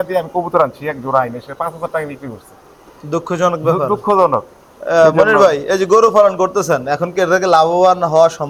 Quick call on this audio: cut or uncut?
uncut